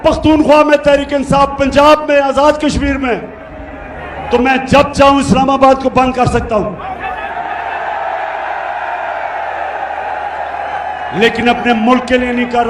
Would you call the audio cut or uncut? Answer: uncut